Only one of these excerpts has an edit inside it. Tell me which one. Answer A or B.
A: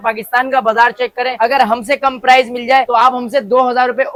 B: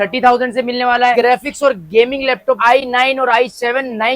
B